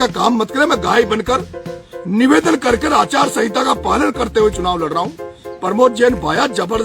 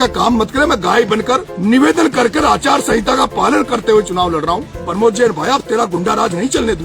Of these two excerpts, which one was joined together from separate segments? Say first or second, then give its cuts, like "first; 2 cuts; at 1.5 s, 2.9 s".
second; 2 cuts; at 1.5 s, 4.8 s